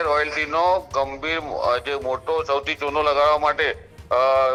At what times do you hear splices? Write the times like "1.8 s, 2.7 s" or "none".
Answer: none